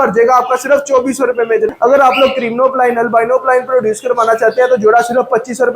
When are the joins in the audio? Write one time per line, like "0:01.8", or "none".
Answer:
0:01.7